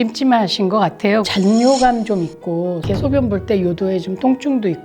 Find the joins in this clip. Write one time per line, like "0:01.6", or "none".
0:01.3
0:02.8